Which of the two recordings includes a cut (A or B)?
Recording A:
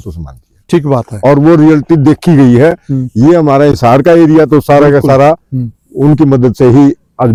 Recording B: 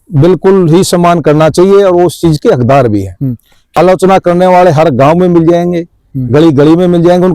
B